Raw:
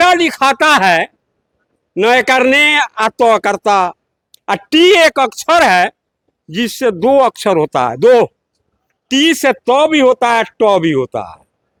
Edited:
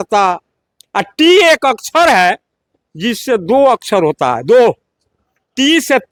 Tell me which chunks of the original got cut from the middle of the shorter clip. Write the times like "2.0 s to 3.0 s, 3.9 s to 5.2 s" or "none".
none